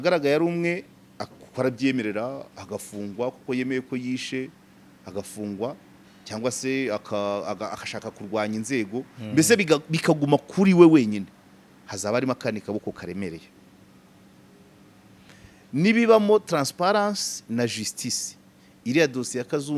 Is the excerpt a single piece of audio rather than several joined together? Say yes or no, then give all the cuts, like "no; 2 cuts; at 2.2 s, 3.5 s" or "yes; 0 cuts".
yes; 0 cuts